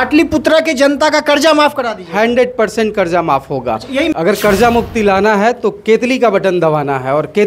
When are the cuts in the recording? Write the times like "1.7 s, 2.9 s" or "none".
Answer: 4.1 s